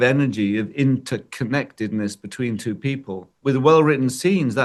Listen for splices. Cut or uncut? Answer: uncut